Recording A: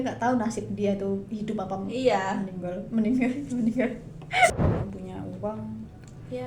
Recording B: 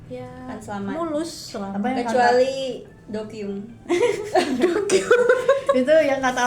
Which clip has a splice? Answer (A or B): A